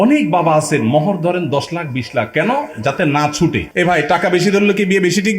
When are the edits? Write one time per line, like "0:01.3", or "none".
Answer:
0:03.6